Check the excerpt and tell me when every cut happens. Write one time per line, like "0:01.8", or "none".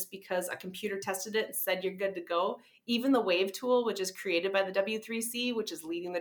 none